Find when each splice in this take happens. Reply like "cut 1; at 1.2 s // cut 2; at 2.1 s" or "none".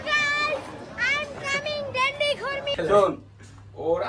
cut 1; at 2.7 s

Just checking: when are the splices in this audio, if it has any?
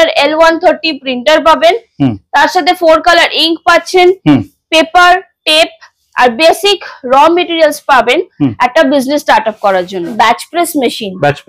cut 1; at 10.1 s

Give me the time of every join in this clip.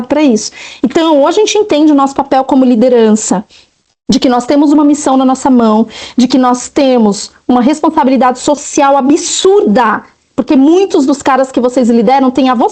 none

